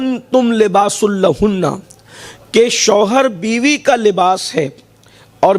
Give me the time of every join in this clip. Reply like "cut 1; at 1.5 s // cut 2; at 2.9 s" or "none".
none